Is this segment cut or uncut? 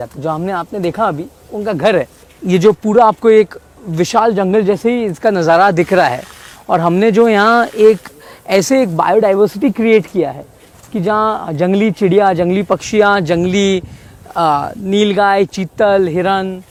uncut